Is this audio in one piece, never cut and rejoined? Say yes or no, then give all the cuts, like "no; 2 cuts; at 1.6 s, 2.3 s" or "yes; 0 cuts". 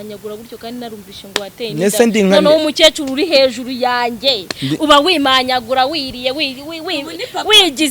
yes; 0 cuts